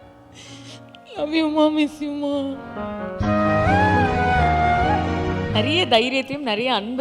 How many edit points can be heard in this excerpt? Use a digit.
1